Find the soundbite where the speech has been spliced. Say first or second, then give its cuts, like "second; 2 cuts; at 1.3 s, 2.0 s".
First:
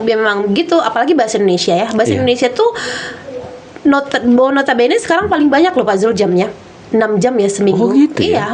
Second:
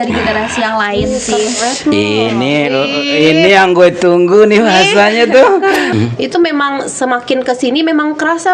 second; 1 cut; at 5.9 s